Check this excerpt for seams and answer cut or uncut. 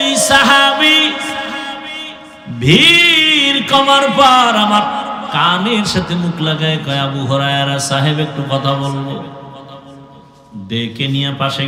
uncut